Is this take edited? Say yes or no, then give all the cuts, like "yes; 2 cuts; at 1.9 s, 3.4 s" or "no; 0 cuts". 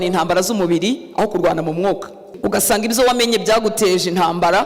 yes; 1 cut; at 2.2 s